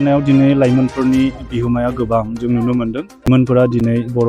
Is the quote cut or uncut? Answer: cut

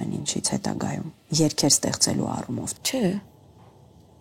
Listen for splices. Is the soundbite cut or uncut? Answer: cut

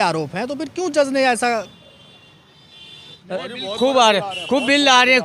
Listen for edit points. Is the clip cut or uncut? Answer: cut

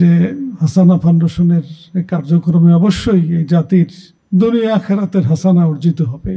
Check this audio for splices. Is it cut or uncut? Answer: uncut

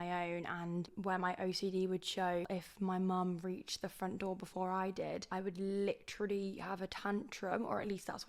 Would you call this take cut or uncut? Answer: cut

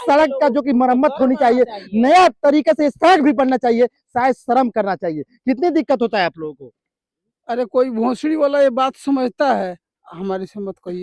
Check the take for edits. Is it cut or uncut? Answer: uncut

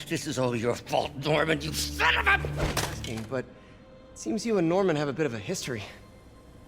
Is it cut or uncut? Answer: cut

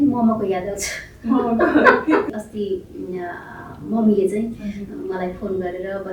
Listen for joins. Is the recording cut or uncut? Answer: cut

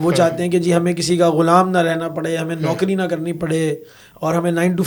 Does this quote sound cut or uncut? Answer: uncut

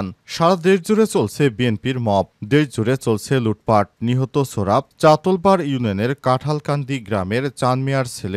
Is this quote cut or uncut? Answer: uncut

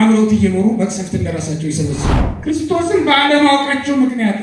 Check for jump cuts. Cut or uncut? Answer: cut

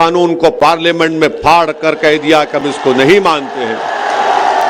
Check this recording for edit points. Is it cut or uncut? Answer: uncut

